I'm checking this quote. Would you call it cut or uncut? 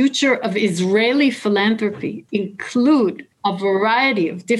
cut